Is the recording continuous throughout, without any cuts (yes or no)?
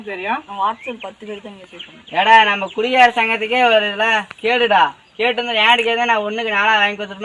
yes